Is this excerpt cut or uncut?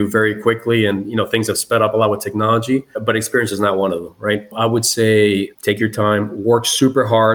uncut